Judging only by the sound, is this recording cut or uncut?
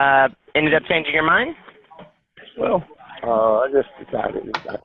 uncut